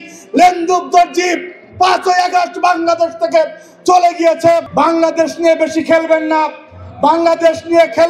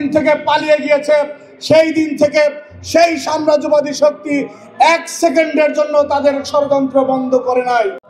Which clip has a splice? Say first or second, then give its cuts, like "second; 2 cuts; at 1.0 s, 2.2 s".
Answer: first; 1 cut; at 4.7 s